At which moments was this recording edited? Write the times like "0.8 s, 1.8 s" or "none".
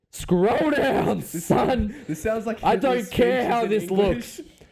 none